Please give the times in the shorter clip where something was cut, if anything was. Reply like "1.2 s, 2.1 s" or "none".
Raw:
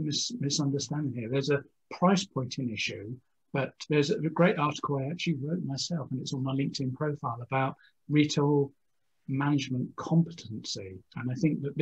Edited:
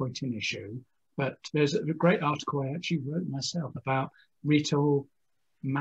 3.8 s

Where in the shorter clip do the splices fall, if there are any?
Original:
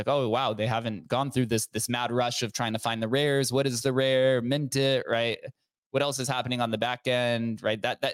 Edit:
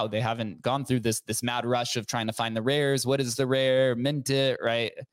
none

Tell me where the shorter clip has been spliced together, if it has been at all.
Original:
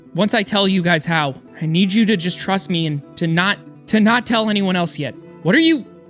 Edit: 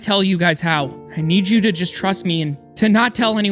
2.6 s

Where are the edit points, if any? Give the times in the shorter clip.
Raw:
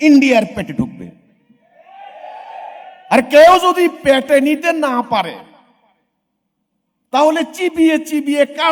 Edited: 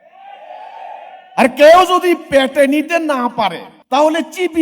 3.7 s

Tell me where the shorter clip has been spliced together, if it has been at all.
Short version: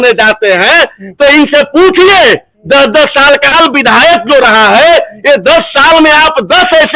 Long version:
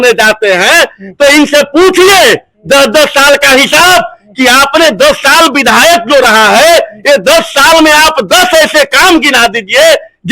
3.5 s

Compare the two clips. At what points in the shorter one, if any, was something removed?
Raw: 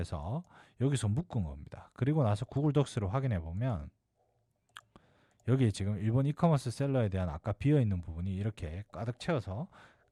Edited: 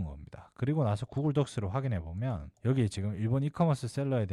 2.5 s

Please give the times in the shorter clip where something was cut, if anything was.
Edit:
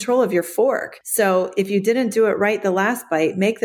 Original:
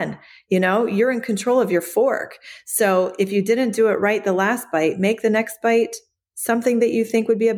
1.0 s

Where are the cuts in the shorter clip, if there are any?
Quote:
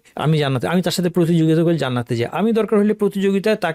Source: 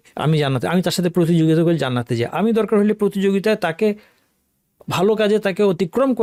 none

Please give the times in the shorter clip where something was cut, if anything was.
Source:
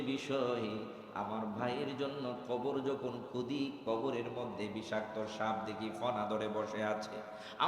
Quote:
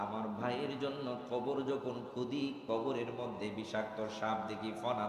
none

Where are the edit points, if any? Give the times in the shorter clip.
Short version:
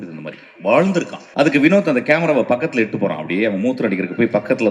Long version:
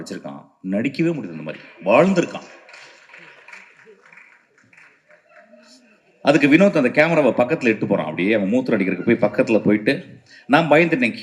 1.2 s

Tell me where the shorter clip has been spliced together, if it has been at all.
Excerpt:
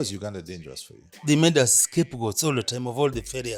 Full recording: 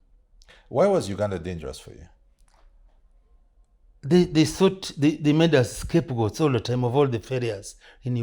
1.2 s

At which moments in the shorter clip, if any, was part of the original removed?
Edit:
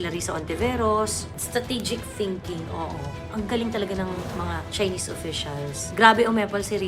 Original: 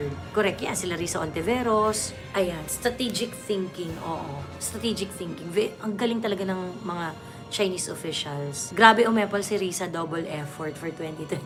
1.4 s, 3.3 s, 4.7 s

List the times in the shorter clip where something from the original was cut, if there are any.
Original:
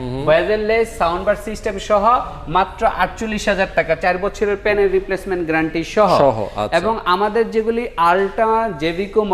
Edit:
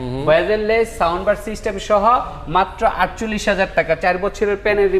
none

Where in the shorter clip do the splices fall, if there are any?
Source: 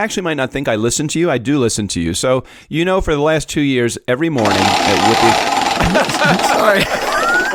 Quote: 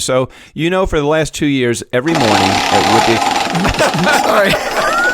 2.3 s

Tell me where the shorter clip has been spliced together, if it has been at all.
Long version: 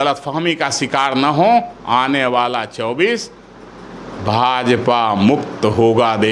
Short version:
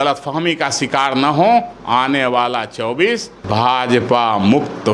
3.3 s

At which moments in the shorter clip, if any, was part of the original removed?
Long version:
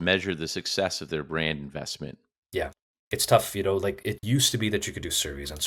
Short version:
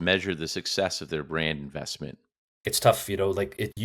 2.4 s

